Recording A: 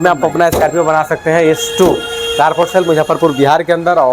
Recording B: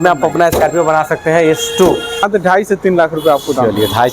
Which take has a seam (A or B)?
B